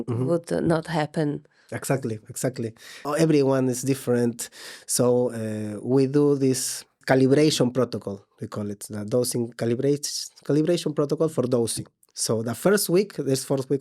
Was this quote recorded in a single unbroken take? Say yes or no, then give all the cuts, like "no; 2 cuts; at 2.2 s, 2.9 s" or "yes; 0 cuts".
no; 2 cuts; at 3.0 s, 7.0 s